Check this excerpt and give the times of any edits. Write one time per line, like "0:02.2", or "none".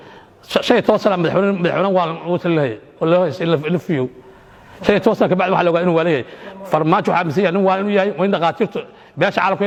none